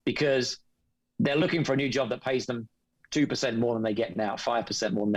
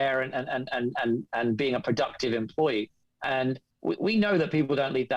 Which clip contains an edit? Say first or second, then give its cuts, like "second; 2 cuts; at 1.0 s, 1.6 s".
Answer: second; 1 cut; at 3.7 s